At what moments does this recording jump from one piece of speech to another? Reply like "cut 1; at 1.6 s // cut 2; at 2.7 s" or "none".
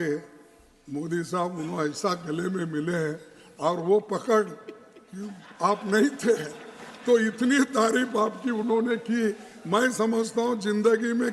none